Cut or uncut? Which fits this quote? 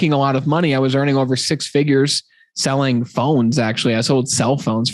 uncut